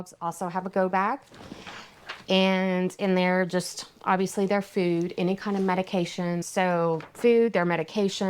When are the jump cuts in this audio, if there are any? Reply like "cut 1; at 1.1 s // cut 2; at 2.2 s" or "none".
none